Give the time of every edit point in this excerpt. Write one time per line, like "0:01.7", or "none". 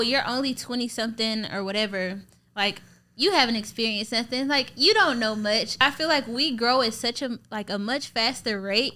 0:05.8